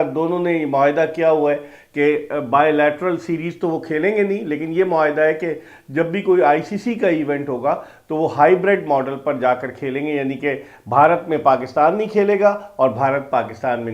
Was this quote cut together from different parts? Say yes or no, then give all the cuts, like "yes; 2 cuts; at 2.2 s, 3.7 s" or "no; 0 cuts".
no; 0 cuts